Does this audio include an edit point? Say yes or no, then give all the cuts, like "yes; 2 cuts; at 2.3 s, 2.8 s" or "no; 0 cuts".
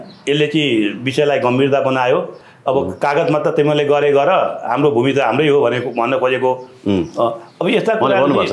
no; 0 cuts